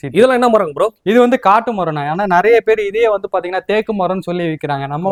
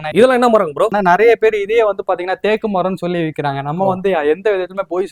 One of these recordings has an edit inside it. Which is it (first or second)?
second